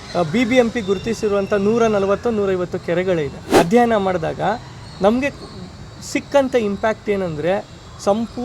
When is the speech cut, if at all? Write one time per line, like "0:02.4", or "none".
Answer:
0:03.4